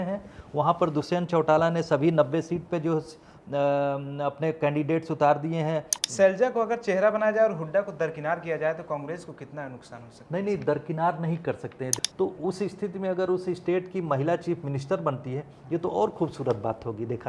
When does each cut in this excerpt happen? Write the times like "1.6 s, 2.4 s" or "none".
5.9 s, 11.9 s